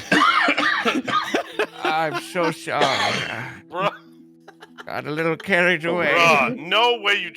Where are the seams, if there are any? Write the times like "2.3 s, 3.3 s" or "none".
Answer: 6.1 s